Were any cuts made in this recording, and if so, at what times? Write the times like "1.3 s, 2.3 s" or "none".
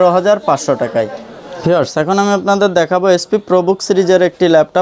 none